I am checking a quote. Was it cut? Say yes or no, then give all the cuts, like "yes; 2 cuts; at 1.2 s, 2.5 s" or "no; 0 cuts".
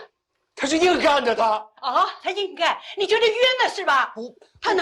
no; 0 cuts